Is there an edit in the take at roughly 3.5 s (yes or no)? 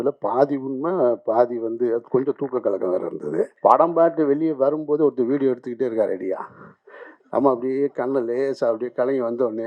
yes